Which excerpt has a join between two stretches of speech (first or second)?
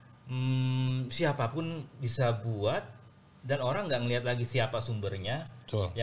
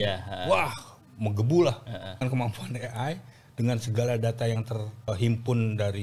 second